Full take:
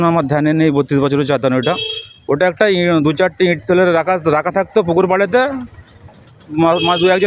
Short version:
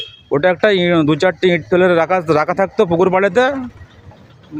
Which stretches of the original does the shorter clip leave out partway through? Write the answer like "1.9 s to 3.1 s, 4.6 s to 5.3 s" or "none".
none